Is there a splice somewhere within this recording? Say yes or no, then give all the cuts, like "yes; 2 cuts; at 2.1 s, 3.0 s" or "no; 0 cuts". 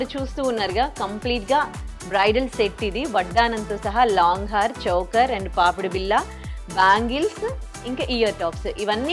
no; 0 cuts